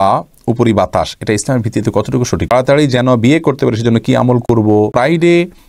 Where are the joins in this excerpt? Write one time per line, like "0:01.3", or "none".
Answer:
0:02.5
0:04.9